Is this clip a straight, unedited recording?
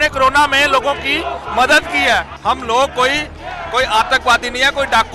no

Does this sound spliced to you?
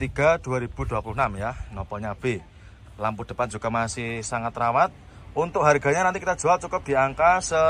no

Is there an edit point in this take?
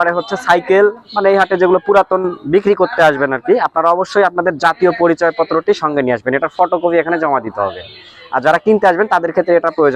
no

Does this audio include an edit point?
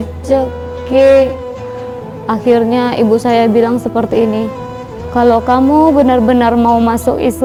no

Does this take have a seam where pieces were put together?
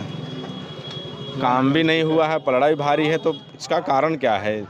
no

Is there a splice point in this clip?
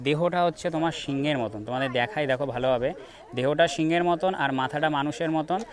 no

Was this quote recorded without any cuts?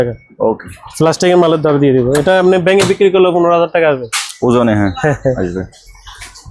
yes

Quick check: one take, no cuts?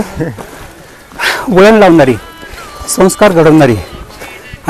yes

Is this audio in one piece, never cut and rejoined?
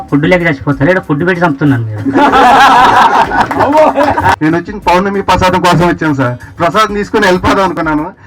no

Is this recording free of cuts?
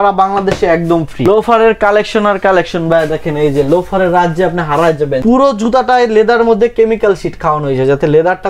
no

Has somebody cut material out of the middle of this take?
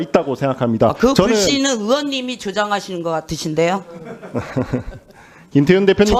no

